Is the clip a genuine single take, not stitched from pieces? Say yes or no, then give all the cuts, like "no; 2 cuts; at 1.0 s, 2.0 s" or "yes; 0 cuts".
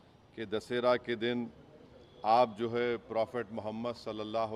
yes; 0 cuts